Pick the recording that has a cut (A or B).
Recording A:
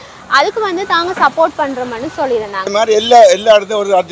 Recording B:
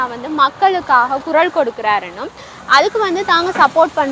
A